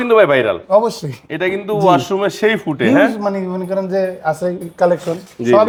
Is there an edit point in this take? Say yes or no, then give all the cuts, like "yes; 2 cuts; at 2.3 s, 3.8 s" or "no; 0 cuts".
no; 0 cuts